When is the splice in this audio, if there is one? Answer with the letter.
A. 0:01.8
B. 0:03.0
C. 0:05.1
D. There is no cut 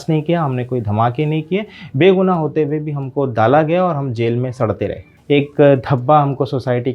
C